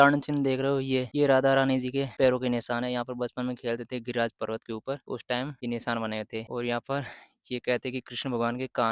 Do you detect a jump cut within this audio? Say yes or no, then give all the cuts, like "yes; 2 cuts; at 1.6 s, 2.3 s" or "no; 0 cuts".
no; 0 cuts